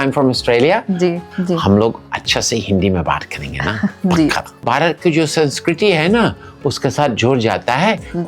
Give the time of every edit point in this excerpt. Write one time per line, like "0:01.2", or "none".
0:01.3
0:04.6